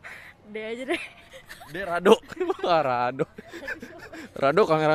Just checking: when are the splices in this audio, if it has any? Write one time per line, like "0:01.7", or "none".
none